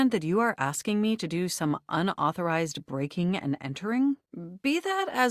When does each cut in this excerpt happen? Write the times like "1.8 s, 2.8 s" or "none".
none